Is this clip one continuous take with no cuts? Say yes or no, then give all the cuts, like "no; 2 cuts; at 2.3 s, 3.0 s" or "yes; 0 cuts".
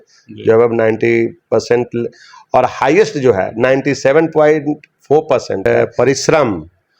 no; 1 cut; at 5.6 s